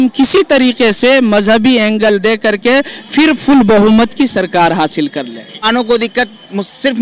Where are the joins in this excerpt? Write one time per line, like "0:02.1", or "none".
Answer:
0:05.7